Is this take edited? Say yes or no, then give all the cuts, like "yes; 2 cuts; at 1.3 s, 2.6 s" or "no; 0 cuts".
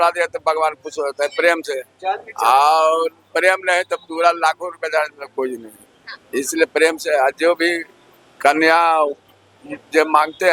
no; 0 cuts